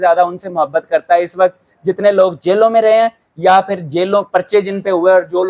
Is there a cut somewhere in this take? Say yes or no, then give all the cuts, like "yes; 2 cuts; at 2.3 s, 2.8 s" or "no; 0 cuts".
no; 0 cuts